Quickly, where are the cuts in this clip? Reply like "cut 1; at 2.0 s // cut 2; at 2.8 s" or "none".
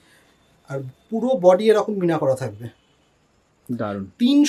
none